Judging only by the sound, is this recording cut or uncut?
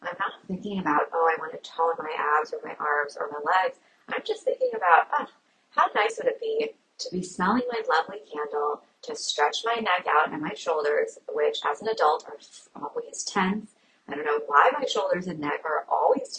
uncut